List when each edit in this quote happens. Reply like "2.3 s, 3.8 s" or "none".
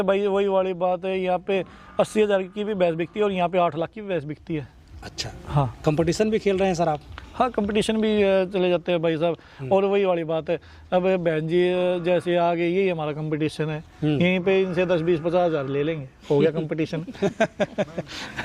none